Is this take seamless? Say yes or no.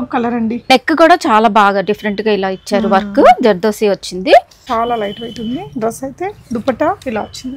no